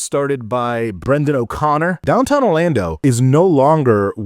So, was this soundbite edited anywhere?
yes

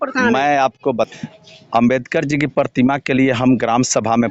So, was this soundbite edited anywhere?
yes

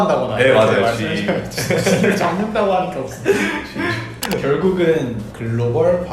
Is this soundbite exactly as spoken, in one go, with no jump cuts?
no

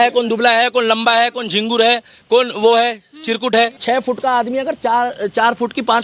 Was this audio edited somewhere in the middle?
yes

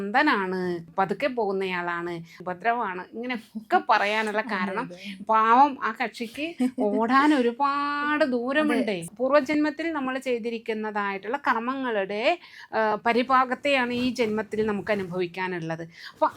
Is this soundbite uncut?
no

